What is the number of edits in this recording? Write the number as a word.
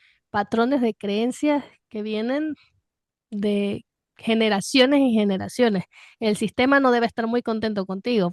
zero